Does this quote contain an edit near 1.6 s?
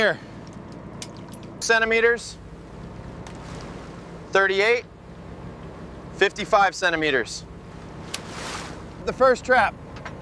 yes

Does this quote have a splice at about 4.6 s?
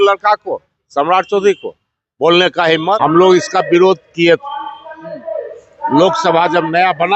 no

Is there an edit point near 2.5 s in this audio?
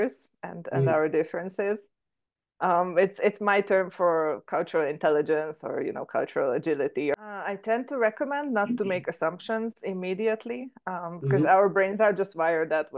no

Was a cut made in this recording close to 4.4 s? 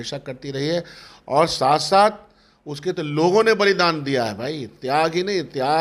no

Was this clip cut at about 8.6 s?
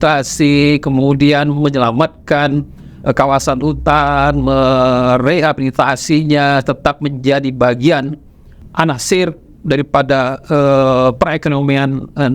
yes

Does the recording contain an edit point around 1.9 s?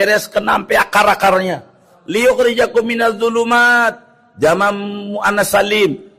yes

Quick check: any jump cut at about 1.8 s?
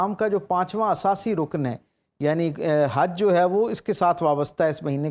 no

